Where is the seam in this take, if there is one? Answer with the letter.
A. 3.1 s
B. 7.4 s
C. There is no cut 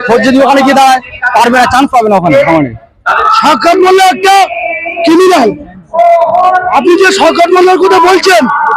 A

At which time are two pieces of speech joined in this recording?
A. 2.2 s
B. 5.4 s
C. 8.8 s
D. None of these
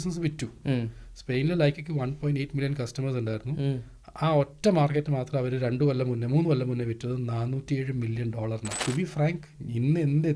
C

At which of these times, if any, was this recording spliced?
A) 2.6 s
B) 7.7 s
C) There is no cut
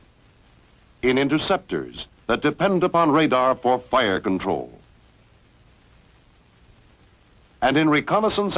B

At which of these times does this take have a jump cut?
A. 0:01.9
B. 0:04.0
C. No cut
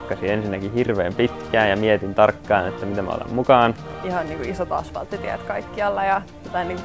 B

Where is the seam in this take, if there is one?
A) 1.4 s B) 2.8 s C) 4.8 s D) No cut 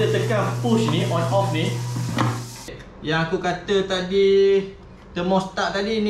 B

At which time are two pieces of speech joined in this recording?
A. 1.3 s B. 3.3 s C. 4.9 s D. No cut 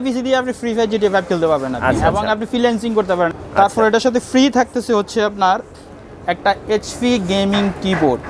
B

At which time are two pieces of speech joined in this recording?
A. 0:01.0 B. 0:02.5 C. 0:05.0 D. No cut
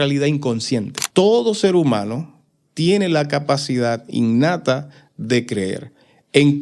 A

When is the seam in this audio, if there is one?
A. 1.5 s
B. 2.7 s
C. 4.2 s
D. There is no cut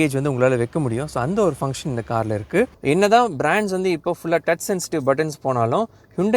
B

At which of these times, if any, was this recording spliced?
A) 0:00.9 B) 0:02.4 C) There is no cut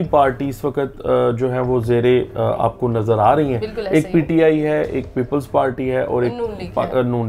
C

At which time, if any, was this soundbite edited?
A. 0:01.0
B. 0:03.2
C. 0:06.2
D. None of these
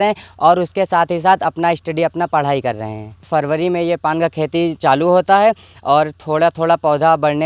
B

